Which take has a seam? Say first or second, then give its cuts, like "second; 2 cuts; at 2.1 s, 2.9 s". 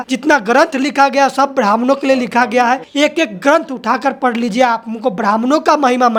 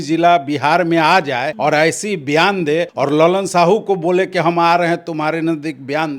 second; 2 cuts; at 1.5 s, 2.9 s